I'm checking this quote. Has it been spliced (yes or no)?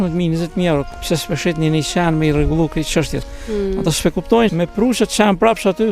yes